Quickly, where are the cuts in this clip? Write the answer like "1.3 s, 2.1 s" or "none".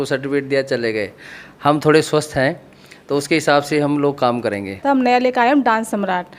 4.8 s

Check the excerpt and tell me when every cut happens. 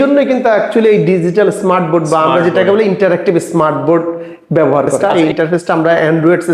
5.0 s

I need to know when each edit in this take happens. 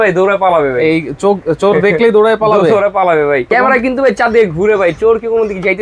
3.5 s

